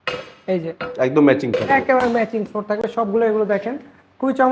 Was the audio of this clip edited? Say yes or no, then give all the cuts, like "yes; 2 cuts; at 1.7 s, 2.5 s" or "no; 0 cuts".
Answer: no; 0 cuts